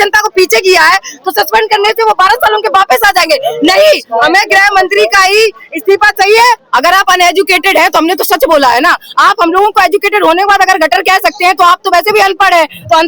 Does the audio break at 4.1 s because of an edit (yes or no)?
no